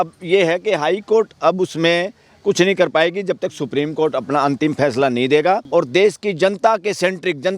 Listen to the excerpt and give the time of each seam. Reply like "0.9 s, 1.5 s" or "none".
5.6 s